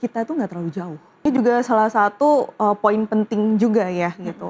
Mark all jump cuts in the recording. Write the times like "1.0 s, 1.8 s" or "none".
1.3 s